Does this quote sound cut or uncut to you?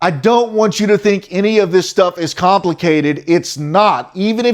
uncut